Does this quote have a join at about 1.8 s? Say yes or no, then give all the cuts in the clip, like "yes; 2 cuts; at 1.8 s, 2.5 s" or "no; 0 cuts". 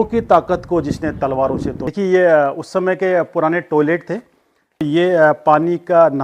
yes; 2 cuts; at 1.8 s, 4.8 s